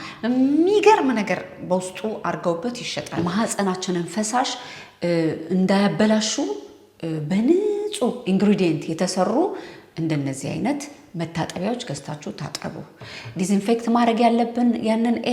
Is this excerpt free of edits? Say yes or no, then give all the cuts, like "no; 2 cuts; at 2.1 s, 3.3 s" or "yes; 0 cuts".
no; 1 cut; at 3.0 s